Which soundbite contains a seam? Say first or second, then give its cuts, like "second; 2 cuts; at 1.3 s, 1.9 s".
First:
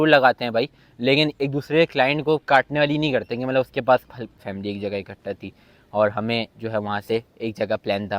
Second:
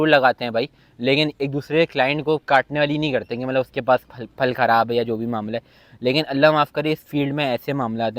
first; 1 cut; at 4.3 s